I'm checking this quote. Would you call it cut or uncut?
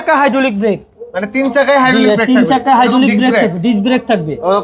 uncut